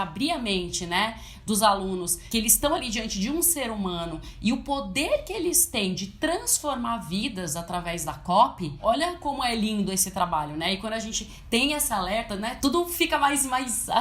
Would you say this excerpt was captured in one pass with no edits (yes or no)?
no